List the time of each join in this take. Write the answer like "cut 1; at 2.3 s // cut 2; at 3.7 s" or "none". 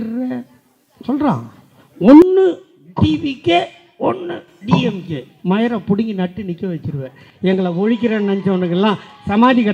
none